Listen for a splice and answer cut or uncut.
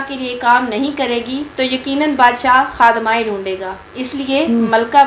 uncut